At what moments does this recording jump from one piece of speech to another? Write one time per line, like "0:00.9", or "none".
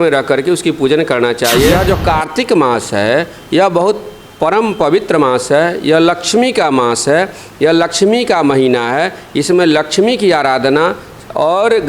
0:01.8